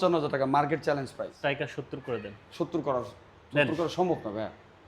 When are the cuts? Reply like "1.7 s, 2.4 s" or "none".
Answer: 1.2 s